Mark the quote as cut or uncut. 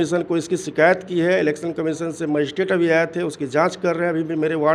uncut